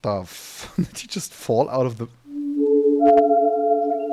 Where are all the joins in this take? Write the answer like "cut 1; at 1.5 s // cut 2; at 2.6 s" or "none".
none